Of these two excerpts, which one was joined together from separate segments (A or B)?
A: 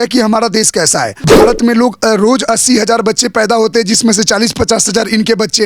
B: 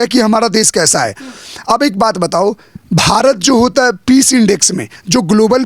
A